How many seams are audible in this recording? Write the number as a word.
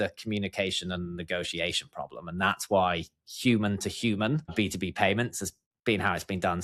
zero